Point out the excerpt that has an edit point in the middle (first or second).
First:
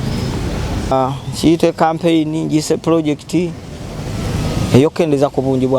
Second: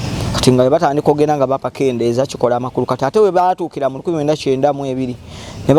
first